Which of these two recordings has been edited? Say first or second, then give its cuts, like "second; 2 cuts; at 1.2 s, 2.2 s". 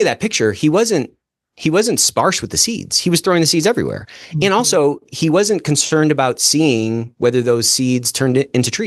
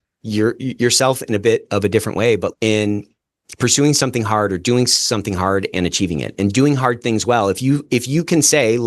second; 1 cut; at 2.5 s